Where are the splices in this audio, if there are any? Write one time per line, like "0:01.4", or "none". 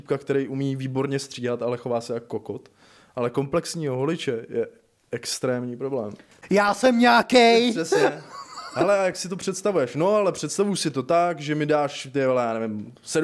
0:06.3